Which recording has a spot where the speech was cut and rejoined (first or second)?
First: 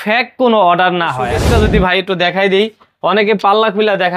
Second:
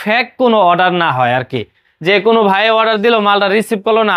first